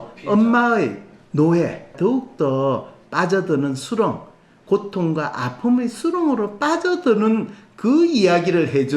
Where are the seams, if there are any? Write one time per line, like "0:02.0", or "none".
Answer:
0:01.9

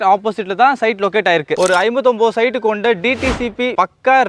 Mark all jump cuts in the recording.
0:01.6

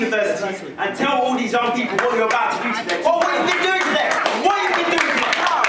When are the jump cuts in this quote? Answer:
none

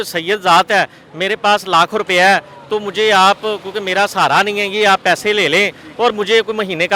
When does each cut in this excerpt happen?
none

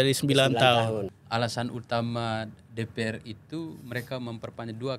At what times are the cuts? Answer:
0:01.2

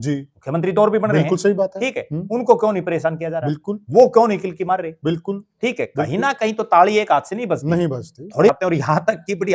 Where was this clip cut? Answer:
0:08.5

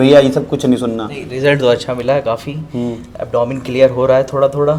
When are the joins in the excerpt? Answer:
none

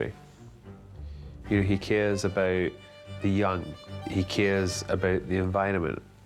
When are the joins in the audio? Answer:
0:03.9

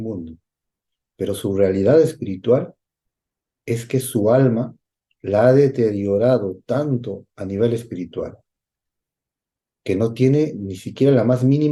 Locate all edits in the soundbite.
none

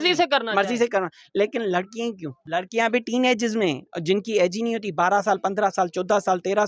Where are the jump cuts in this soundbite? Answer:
0:02.4

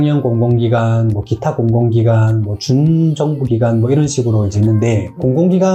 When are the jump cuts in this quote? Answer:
none

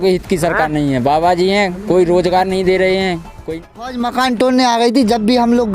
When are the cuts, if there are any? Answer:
0:03.7

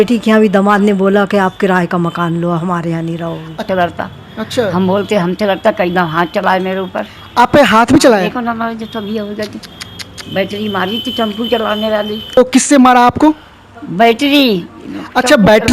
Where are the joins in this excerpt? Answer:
0:03.6
0:12.4

